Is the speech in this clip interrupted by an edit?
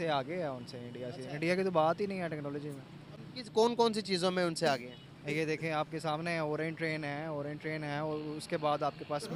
no; 0 cuts

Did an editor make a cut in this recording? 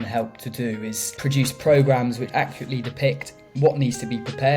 yes; 2 cuts; at 1.1 s, 2.3 s

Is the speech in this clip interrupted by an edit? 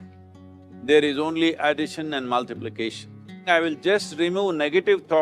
yes; 1 cut; at 3.4 s

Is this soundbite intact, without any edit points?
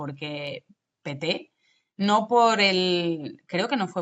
yes; 0 cuts

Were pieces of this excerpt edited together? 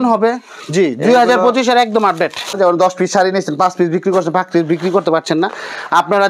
yes; 1 cut; at 2.5 s

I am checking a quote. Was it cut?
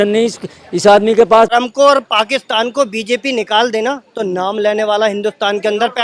yes; 1 cut; at 1.5 s

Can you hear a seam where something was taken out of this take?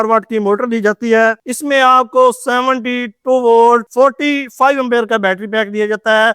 yes; 1 cut; at 1.4 s

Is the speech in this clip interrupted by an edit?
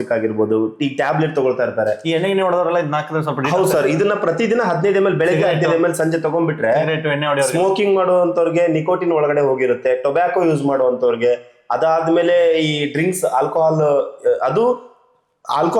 no; 0 cuts

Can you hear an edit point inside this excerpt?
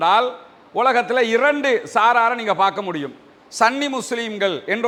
no; 0 cuts

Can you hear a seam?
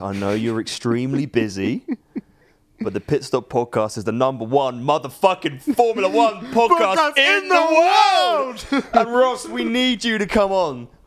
no; 0 cuts

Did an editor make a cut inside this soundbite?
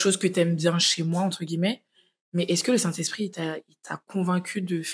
no; 0 cuts

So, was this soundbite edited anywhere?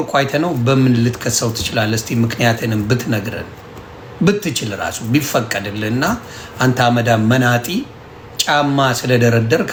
no; 0 cuts

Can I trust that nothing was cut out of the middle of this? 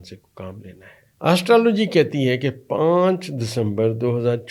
no; 1 cut; at 1.0 s

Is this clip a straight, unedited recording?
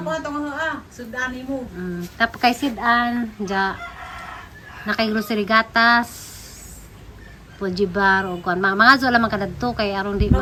yes; 0 cuts

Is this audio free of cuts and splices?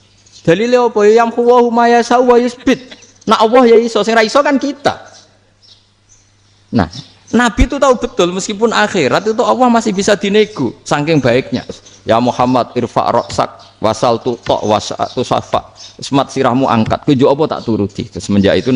no; 1 cut; at 11.9 s

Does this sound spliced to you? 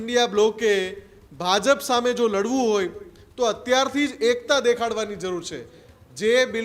no; 0 cuts

